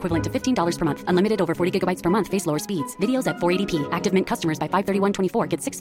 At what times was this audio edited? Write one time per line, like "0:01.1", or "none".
none